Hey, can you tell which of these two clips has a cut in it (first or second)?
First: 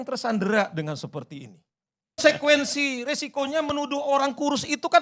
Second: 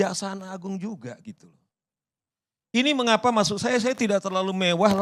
first